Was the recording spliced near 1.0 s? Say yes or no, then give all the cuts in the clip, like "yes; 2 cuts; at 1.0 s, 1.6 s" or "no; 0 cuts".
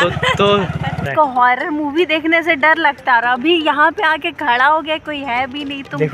yes; 1 cut; at 1.0 s